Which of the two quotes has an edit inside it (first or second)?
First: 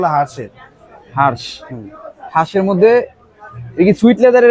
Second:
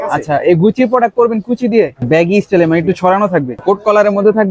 second